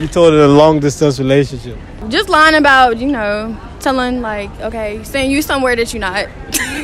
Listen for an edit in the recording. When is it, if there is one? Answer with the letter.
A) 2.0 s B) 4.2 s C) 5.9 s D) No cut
A